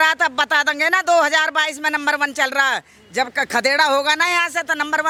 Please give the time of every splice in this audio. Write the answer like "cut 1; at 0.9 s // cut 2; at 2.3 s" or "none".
none